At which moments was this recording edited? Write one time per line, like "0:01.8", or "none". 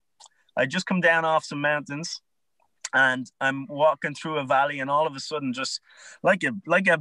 none